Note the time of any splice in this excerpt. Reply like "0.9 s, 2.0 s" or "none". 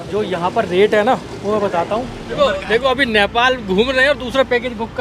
2.4 s